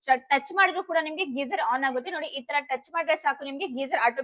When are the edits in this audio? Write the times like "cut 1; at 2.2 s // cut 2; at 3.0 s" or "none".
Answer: none